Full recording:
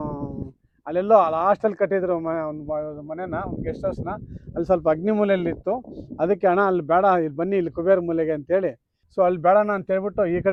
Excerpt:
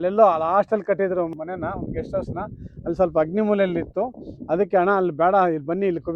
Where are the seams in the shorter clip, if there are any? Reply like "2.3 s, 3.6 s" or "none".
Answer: 1.3 s